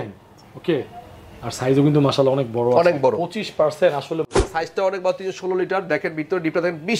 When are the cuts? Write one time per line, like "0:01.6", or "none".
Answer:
0:04.3